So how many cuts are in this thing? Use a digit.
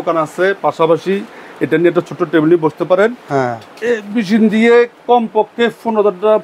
0